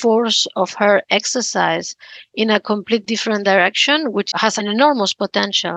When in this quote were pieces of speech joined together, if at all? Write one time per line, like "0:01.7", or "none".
0:04.6